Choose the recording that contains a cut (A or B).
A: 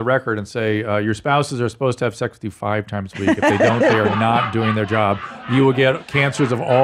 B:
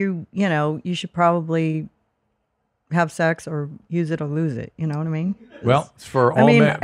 B